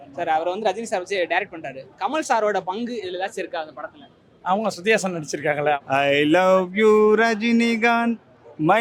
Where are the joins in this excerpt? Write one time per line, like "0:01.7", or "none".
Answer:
0:05.8